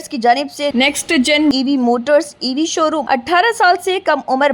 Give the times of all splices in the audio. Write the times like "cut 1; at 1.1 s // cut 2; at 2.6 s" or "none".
cut 1; at 3.0 s